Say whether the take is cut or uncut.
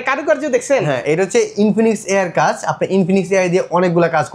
uncut